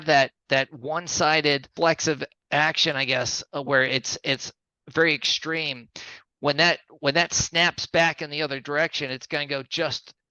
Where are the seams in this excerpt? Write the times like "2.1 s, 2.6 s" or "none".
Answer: 1.7 s